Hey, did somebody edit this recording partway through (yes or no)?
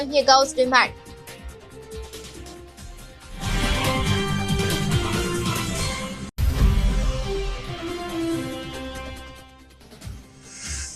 yes